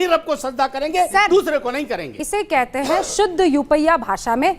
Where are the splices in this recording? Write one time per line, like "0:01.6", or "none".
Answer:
0:02.1